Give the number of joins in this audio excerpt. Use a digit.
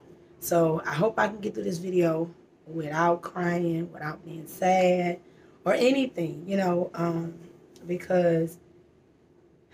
0